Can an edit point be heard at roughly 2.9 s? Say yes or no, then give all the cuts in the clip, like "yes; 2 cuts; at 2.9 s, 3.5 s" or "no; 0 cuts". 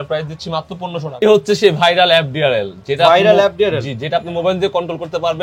no; 1 cut; at 1.1 s